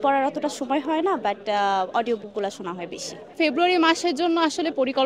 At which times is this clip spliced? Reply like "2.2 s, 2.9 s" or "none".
none